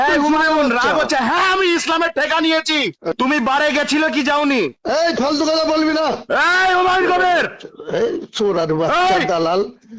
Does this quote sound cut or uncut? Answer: cut